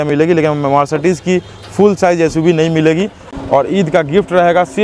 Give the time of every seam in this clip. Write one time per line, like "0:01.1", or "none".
0:03.3